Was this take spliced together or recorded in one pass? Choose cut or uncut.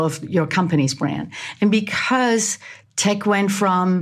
uncut